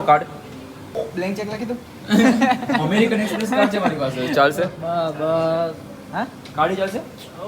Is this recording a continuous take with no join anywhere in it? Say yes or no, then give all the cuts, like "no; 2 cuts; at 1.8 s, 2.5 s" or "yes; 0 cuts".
no; 1 cut; at 0.9 s